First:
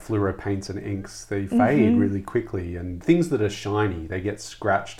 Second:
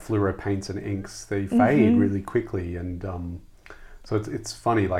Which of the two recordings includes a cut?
first; 1 cut; at 3.0 s

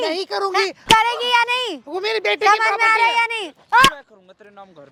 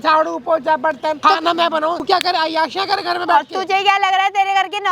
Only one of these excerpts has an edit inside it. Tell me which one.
second; 2 cuts; at 1.2 s, 2.0 s

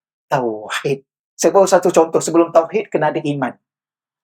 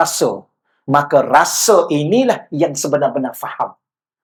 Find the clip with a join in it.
first; 1 cut; at 1.2 s

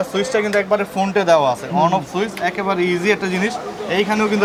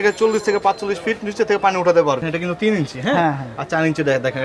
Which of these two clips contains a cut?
second; 1 cut; at 2.2 s

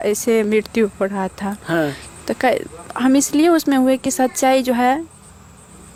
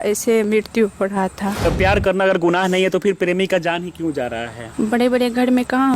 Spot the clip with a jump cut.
second; 2 cuts; at 1.7 s, 4.6 s

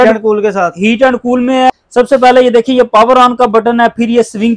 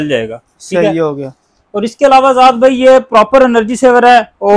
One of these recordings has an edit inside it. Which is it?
first; 1 cut; at 1.7 s

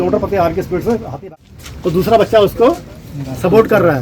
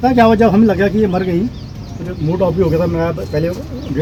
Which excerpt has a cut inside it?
first; 1 cut; at 1.3 s

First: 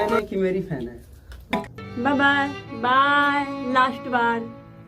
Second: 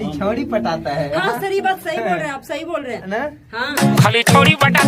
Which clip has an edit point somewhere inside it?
first; 1 cut; at 1.6 s

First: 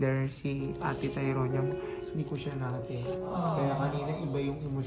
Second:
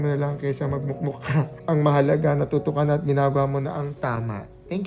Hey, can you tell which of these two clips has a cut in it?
second; 1 cut; at 1.5 s

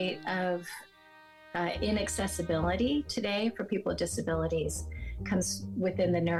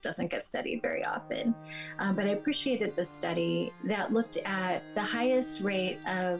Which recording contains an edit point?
second; 2 cuts; at 3.8 s, 4.9 s

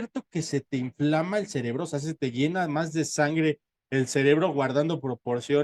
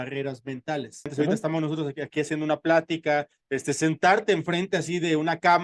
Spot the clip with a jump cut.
second; 1 cut; at 1.1 s

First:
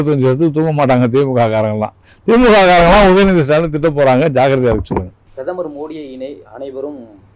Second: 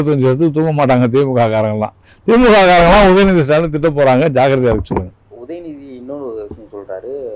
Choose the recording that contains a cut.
first; 1 cut; at 5.2 s

